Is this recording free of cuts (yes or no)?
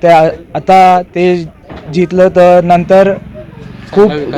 yes